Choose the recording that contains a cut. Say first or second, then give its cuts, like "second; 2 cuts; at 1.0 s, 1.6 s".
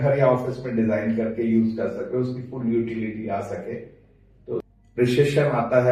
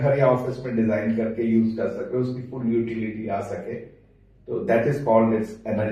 first; 1 cut; at 4.6 s